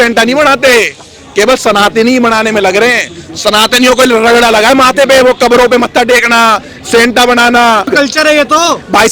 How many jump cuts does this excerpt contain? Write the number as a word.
one